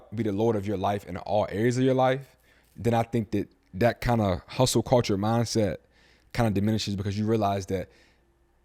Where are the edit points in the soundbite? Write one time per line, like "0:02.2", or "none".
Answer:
none